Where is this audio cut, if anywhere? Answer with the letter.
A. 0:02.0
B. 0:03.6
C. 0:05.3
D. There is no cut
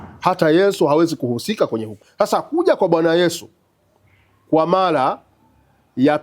A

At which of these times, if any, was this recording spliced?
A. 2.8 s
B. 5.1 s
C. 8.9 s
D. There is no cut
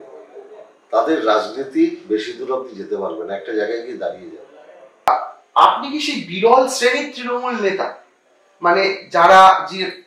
B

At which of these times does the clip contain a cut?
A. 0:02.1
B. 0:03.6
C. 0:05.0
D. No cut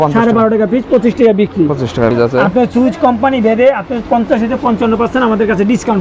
A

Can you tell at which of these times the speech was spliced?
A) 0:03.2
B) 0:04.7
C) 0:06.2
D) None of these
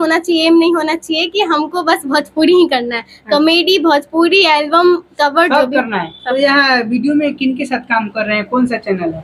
C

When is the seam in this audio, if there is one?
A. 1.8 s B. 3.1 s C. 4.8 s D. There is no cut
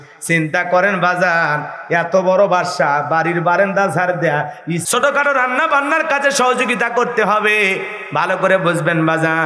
C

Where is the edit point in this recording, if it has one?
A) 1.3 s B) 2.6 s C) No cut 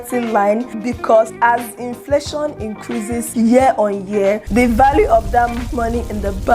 A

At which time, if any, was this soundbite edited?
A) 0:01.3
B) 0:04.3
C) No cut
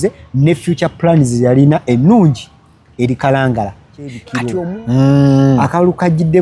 B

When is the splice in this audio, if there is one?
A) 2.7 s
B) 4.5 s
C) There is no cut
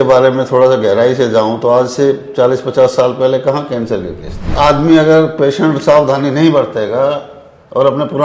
B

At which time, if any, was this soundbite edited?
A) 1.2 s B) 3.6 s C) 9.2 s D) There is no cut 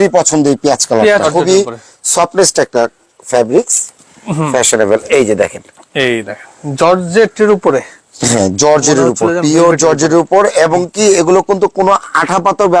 A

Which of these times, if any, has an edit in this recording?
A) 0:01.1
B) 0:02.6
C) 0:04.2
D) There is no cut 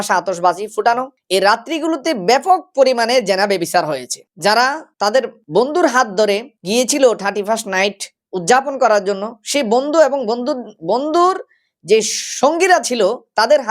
A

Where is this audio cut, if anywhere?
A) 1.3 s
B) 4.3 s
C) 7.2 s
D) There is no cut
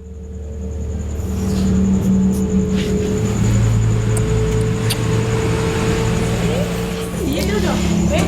C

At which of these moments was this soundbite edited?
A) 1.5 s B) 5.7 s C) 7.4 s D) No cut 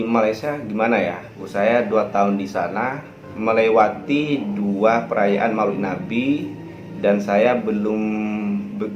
A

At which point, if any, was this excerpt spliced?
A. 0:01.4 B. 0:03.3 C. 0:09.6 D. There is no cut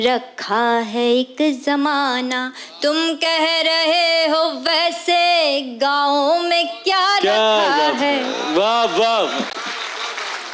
C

